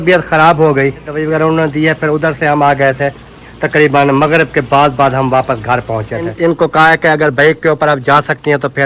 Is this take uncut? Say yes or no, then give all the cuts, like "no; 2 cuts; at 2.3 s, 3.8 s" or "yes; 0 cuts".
no; 2 cuts; at 1.1 s, 6.3 s